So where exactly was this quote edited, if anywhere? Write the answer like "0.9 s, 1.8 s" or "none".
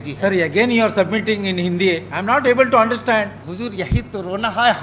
3.4 s